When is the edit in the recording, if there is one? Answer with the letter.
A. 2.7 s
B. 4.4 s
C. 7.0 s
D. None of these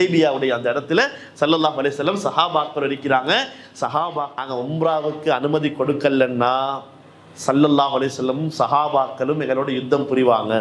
B